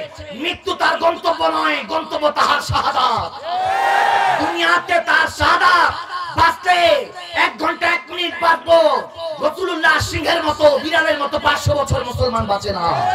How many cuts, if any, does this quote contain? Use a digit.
0